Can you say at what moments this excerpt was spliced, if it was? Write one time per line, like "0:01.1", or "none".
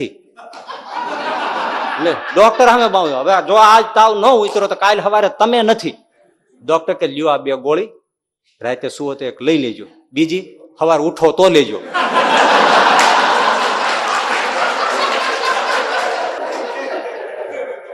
none